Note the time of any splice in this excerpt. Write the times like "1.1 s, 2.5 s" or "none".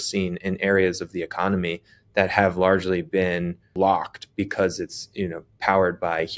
3.7 s